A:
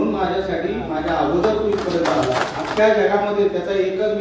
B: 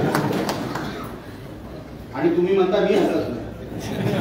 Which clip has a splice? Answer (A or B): A